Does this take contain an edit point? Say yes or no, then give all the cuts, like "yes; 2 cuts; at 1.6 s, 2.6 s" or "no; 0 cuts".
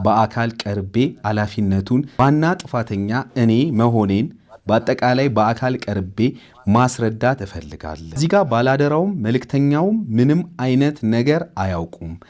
yes; 2 cuts; at 2.2 s, 8.2 s